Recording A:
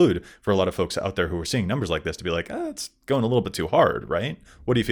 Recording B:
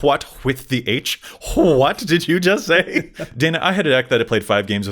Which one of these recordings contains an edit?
B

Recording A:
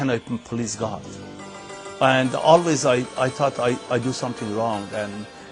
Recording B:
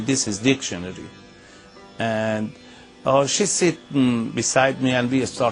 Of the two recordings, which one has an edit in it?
A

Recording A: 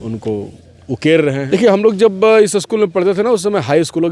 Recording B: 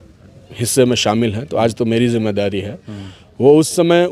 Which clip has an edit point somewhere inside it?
A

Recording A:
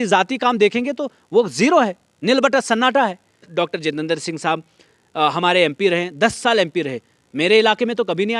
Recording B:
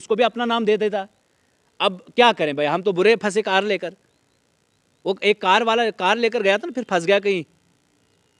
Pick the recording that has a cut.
A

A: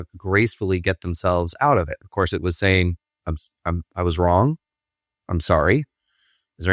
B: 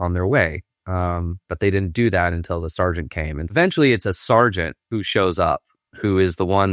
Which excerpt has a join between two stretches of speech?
B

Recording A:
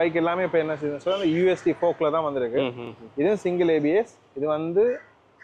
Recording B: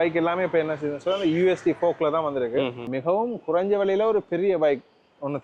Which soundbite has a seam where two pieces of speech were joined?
B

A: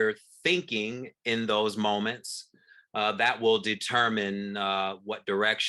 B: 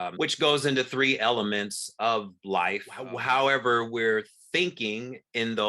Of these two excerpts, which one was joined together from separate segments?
B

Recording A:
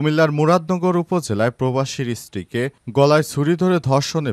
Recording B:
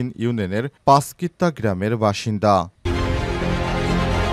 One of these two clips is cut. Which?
B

